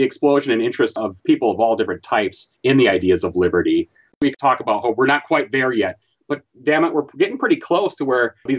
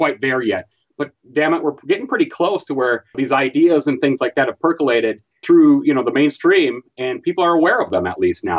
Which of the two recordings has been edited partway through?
first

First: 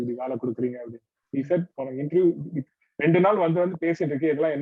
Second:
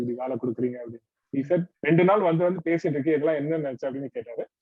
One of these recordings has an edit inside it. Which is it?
second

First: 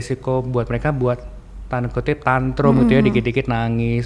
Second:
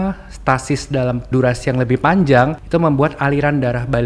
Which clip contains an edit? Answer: second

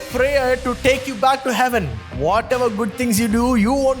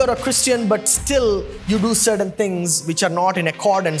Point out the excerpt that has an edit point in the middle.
first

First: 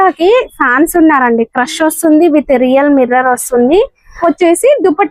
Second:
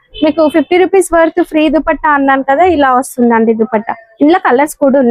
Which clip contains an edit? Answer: first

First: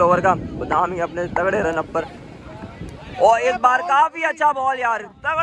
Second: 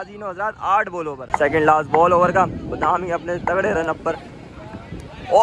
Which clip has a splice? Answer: second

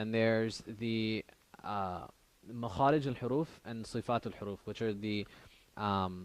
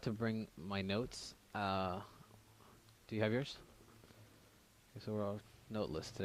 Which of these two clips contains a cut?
first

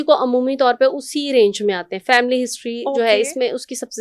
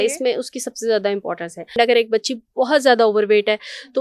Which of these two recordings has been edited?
second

